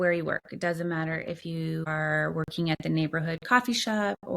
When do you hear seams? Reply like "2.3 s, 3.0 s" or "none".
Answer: 1.5 s